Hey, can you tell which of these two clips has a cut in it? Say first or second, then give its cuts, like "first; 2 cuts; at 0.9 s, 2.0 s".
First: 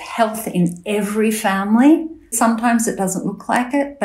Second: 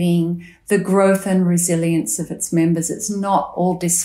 first; 1 cut; at 2.3 s